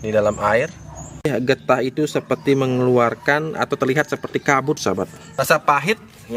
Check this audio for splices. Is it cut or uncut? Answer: cut